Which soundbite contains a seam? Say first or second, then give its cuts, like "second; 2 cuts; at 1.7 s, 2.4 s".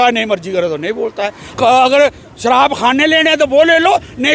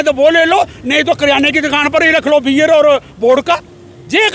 first; 1 cut; at 1.4 s